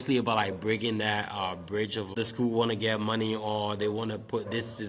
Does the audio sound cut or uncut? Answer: cut